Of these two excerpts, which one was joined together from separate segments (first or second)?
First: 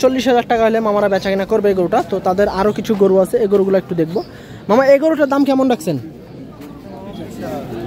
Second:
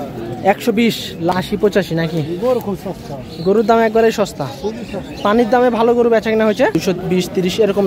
second